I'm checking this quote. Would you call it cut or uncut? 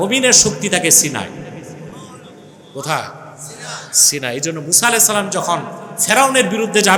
uncut